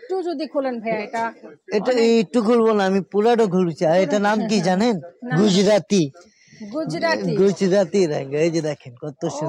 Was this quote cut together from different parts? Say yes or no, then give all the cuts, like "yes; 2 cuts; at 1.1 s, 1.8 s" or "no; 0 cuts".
no; 0 cuts